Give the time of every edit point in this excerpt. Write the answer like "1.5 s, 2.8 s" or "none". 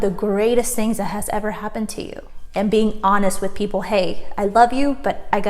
2.3 s

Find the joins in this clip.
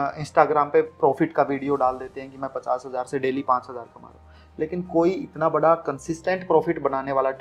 none

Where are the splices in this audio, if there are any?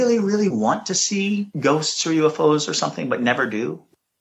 1.5 s

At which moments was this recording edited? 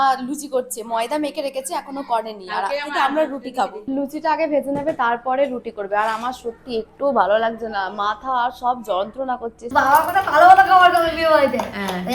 3.8 s, 9.6 s

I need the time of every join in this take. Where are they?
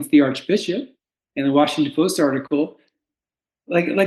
none

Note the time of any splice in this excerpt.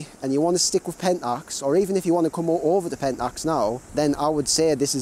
3.8 s

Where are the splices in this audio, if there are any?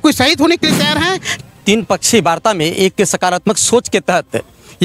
1.4 s

